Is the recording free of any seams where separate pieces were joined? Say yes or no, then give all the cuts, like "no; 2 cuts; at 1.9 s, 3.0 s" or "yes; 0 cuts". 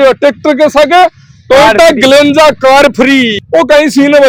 yes; 0 cuts